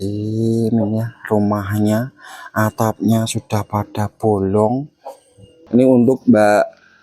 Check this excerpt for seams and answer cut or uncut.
cut